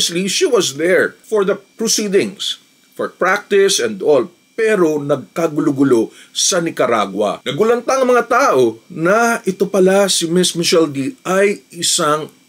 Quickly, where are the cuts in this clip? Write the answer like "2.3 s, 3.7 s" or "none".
7.4 s